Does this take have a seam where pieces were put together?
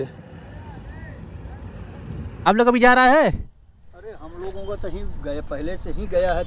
yes; 1 cut; at 2.5 s

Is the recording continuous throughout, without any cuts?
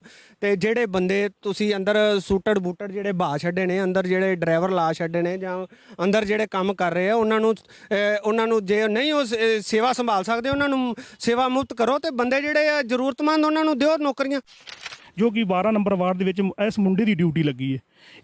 no; 1 cut; at 14.8 s

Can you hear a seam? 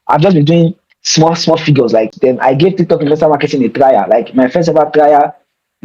yes; 1 cut; at 2.1 s

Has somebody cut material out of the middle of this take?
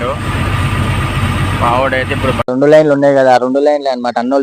yes; 1 cut; at 2.5 s

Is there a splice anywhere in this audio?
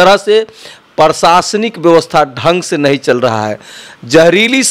no; 0 cuts

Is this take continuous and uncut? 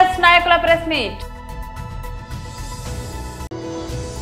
no; 2 cuts; at 1.2 s, 3.5 s

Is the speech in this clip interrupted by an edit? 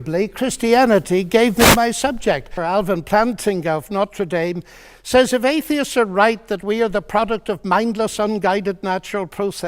yes; 1 cut; at 2.5 s

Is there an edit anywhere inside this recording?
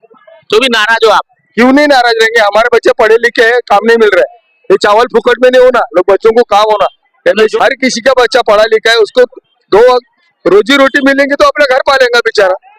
yes; 1 cut; at 7.5 s

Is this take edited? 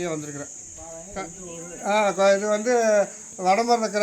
yes; 1 cut; at 1.1 s

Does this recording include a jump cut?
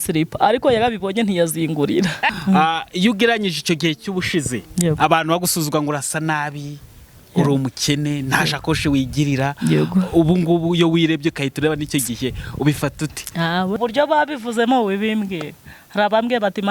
yes; 2 cuts; at 2.3 s, 13.8 s

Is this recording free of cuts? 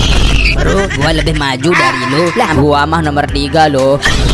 no; 1 cut; at 2.5 s

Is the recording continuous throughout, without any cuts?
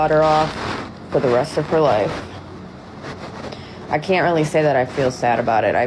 yes; 0 cuts

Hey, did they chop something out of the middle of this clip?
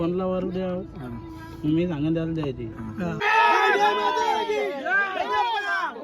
yes; 1 cut; at 3.2 s

